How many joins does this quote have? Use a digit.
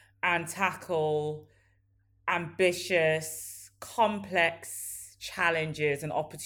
0